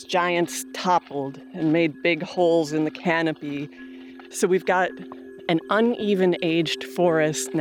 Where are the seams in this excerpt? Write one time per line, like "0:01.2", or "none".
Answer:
0:04.2
0:05.4